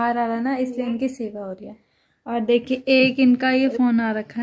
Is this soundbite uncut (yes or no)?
yes